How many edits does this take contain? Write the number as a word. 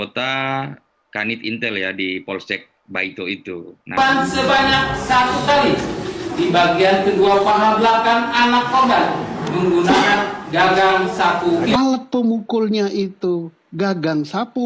one